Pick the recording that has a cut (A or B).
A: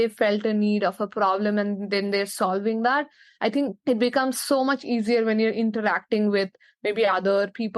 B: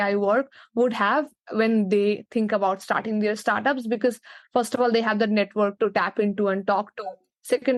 A